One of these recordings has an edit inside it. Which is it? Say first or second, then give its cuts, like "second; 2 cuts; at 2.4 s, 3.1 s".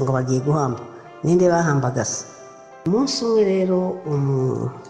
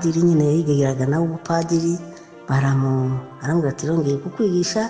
first; 1 cut; at 2.8 s